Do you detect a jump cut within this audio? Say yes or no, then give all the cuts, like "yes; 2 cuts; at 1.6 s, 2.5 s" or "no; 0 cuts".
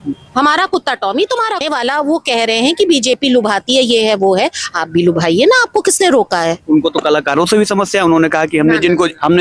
yes; 1 cut; at 1.6 s